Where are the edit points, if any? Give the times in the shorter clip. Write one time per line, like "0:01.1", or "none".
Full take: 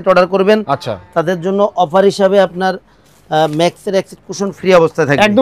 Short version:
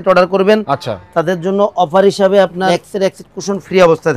0:02.7